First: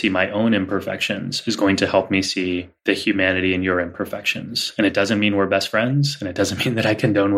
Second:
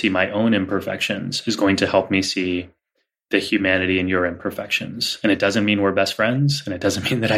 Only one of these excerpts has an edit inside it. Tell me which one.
first; 1 cut; at 2.7 s

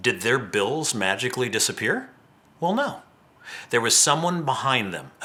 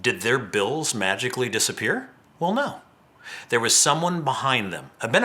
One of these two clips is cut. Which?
second; 1 cut; at 2.2 s

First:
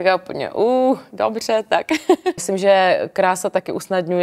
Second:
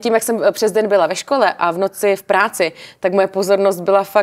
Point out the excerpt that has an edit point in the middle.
first; 1 cut; at 2.4 s

